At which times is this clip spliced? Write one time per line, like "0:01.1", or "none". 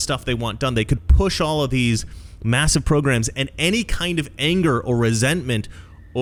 none